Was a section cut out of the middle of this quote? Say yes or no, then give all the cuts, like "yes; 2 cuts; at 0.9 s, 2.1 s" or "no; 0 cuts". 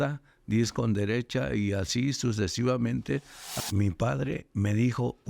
yes; 1 cut; at 3.6 s